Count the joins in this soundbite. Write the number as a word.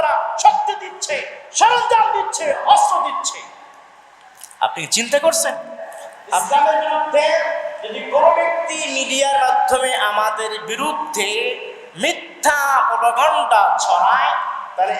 one